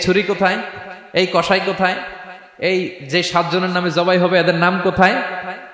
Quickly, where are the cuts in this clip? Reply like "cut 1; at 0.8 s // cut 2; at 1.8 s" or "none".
none